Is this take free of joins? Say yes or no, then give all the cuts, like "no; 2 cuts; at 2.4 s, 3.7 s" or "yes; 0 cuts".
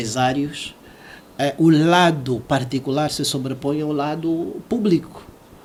yes; 0 cuts